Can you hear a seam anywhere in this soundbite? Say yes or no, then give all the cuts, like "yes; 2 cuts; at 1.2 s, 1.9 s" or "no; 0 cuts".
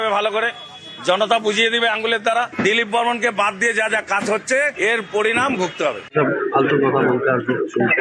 yes; 1 cut; at 2.5 s